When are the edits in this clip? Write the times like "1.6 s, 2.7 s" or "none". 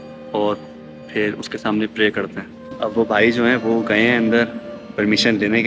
2.6 s